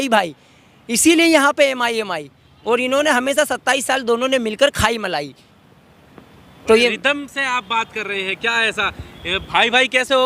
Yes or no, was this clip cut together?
no